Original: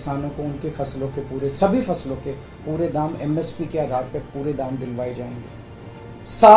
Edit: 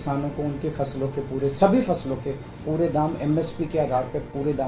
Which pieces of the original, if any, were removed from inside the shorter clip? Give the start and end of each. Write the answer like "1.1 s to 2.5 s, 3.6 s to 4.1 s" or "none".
none

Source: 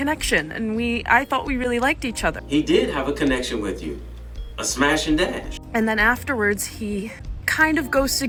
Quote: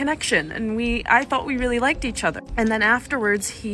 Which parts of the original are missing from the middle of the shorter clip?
2.4 s to 5.6 s

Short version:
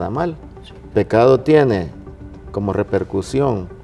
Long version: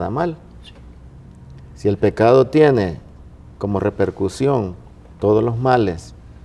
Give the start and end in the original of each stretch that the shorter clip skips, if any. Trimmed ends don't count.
0.9 s to 2.0 s

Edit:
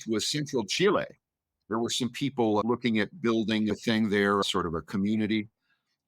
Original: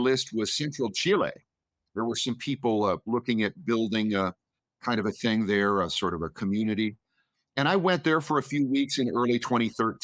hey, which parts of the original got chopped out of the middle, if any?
2.9 s to 3.0 s, 4.1 s to 5.1 s, 5.8 s to 5.9 s

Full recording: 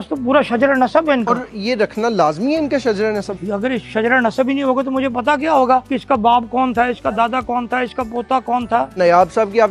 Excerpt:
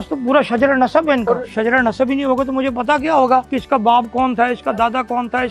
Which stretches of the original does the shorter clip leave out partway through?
1.5 s to 3.8 s

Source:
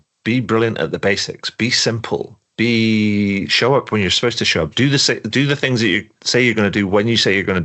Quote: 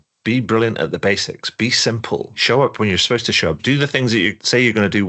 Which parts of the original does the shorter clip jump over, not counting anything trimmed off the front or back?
2.4 s to 3.5 s, 5.3 s to 6.0 s

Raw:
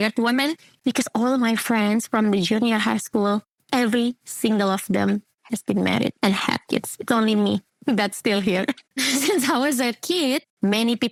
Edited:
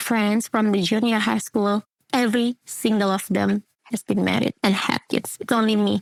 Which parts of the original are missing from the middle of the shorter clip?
none

